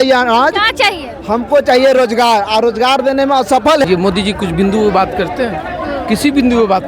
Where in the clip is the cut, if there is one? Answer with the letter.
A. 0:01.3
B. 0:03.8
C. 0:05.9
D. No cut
B